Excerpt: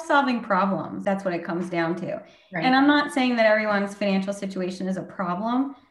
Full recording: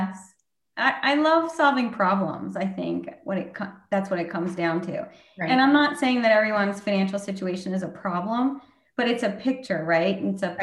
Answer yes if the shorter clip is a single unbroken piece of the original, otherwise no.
no